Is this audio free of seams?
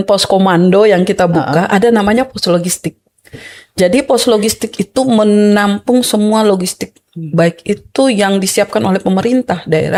yes; 0 cuts

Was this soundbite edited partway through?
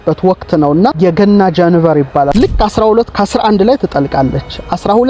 yes; 2 cuts; at 0.9 s, 2.3 s

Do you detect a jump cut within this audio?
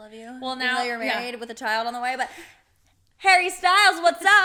no; 0 cuts

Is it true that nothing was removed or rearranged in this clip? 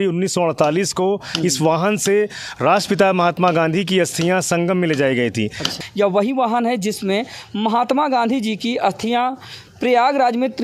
no; 1 cut; at 5.7 s

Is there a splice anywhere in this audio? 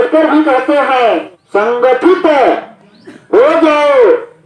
yes; 1 cut; at 1.4 s

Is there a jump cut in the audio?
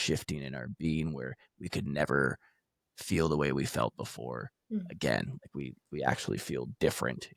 no; 0 cuts

